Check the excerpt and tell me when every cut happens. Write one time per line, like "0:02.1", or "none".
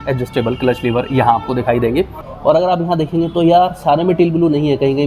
0:02.2